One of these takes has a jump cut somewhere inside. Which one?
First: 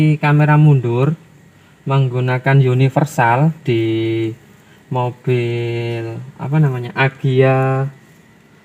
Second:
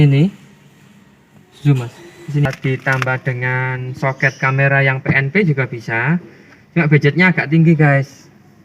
second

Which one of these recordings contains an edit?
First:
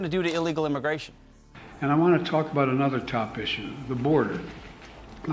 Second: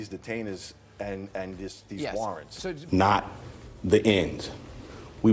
second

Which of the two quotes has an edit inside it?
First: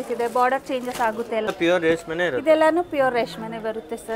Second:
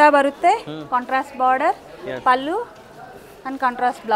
first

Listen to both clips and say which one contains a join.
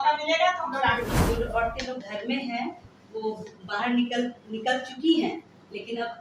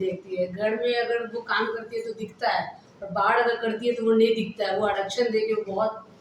first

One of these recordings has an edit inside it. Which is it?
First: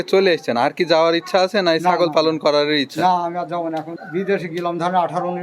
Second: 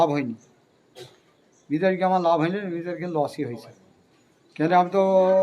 first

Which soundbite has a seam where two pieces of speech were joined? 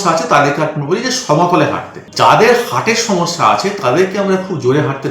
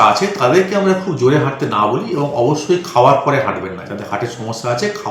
first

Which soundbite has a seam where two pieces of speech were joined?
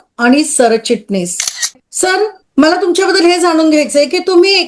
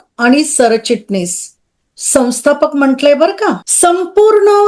first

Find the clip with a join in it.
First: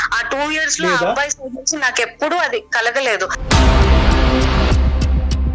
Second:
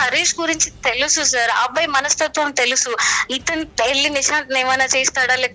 first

